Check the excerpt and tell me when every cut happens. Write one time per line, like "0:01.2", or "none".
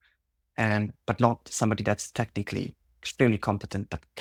none